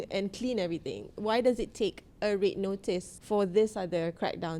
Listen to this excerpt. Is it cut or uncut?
cut